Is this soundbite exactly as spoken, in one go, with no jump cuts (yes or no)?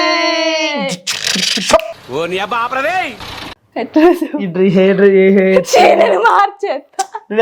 no